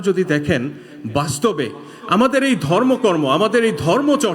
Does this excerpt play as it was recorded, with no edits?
yes; 0 cuts

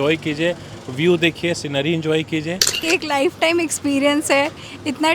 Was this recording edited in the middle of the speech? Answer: yes; 1 cut; at 2.8 s

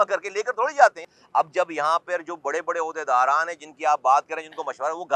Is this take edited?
yes; 1 cut; at 1.0 s

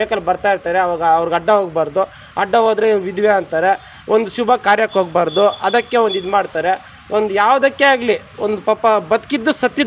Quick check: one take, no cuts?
yes; 0 cuts

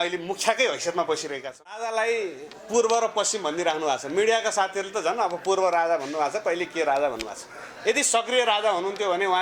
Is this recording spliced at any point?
yes; 1 cut; at 1.8 s

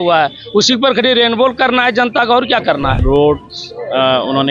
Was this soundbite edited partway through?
yes; 1 cut; at 3.0 s

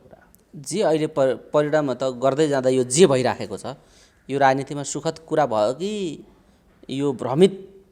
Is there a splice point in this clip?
no; 0 cuts

